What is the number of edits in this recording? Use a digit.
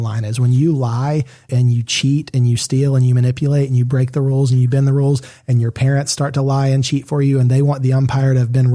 1